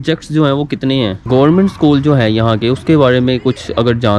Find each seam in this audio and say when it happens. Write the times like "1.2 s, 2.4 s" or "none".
1.2 s

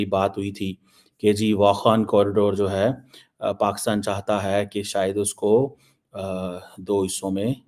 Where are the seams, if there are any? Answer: none

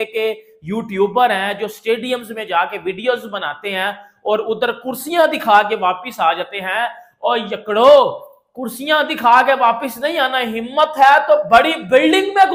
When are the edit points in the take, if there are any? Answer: none

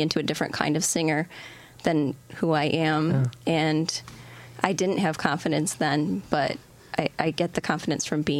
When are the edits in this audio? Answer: none

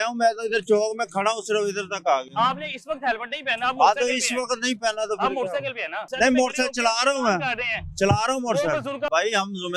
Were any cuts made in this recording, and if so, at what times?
6.1 s, 9.1 s

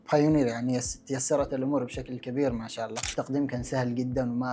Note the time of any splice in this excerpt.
3.1 s

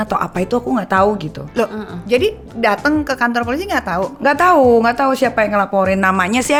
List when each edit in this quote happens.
none

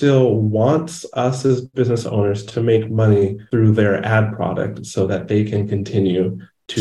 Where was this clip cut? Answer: 3.4 s

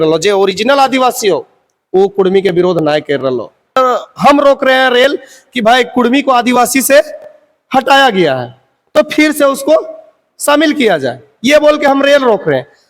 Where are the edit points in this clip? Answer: 3.8 s

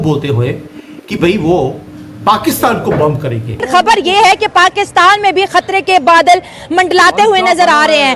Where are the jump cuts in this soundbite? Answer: 3.6 s

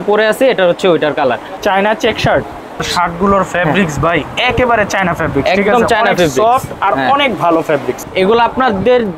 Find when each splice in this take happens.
1.5 s, 2.8 s, 8.0 s

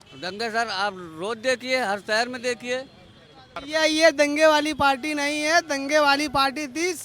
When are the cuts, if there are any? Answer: 3.6 s

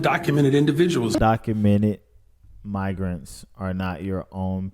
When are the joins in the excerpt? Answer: 1.2 s

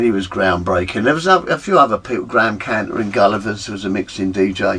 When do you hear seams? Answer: none

